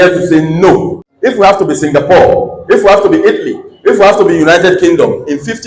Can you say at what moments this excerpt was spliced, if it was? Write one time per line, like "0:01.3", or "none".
0:01.0